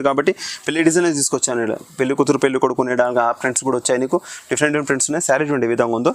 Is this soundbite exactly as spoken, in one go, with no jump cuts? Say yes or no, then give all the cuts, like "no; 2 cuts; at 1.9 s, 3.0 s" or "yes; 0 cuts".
yes; 0 cuts